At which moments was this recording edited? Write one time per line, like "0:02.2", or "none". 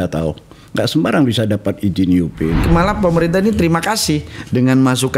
0:02.6